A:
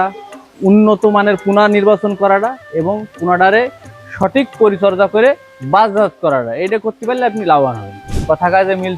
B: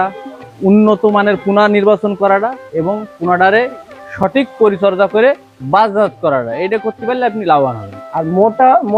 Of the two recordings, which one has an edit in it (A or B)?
A